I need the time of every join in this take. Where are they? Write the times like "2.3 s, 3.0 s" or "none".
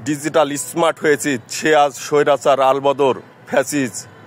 none